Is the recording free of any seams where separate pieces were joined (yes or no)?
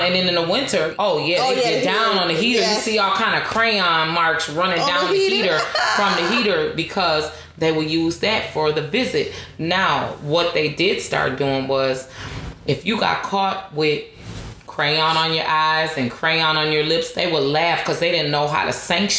no